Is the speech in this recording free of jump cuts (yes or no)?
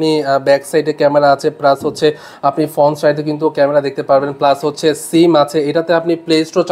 yes